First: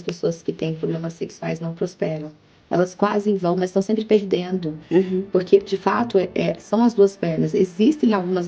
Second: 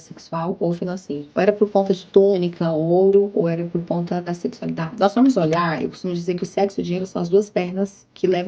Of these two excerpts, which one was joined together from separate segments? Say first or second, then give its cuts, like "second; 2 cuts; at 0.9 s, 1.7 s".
second; 2 cuts; at 1.3 s, 4.9 s